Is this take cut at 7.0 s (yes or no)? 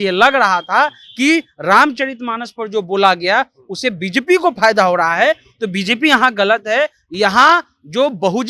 no